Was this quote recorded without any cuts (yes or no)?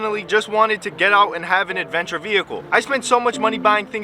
yes